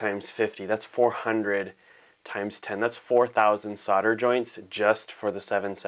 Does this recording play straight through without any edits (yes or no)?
yes